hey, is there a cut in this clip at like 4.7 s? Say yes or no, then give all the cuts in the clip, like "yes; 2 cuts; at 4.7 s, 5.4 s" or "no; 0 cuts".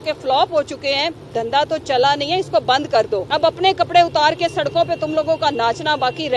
no; 2 cuts; at 1.3 s, 3.2 s